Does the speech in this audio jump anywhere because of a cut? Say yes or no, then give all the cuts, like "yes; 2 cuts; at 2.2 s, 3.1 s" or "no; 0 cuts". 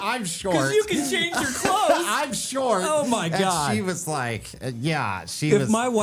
no; 0 cuts